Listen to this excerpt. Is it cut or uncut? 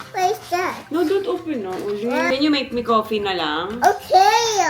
cut